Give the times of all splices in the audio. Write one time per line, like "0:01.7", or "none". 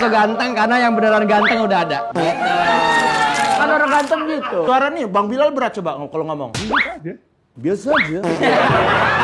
0:03.5
0:04.7